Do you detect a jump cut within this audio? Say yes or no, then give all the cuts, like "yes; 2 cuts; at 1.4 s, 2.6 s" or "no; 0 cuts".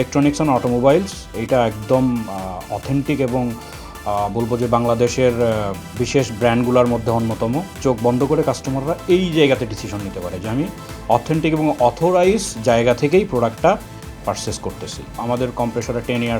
no; 0 cuts